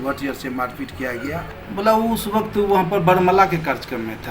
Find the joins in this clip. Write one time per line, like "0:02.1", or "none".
0:01.6